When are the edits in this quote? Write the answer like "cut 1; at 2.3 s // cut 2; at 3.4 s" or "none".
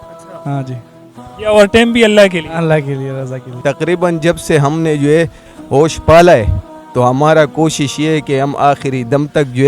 cut 1; at 3.6 s